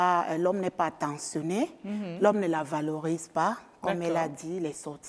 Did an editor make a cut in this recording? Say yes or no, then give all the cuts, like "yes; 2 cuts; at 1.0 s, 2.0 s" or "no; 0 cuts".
no; 0 cuts